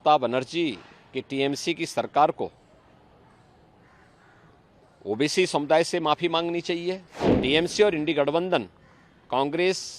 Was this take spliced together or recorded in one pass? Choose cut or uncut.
cut